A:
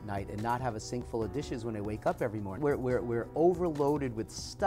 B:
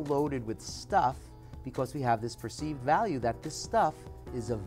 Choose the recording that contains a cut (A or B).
A